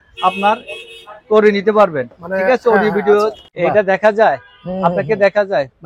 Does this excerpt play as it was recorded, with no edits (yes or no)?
no